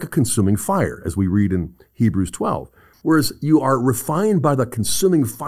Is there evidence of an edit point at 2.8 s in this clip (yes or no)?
yes